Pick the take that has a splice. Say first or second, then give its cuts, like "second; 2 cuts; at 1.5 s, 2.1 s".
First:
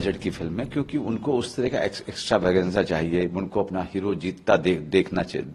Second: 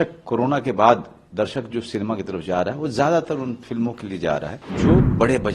second; 1 cut; at 4.6 s